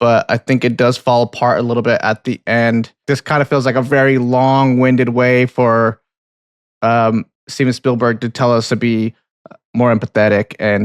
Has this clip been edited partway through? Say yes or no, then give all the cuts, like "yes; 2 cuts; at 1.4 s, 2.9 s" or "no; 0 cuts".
yes; 1 cut; at 3.0 s